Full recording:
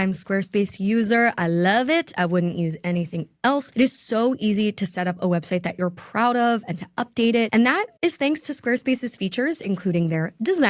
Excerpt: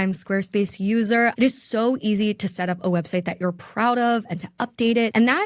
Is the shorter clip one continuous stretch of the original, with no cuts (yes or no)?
no